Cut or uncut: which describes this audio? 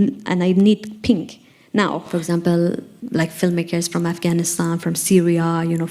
cut